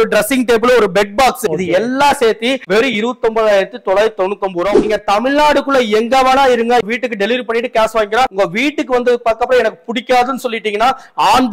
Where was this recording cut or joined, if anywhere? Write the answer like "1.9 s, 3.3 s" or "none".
1.4 s, 4.8 s, 6.8 s, 8.3 s

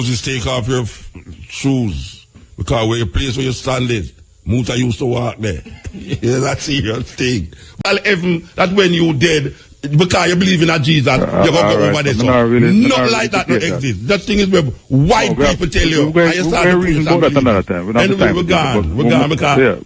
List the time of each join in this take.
7.8 s

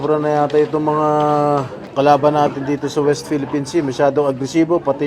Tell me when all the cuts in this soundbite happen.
1.8 s

